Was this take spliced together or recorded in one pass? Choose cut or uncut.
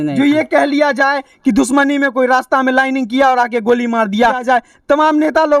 cut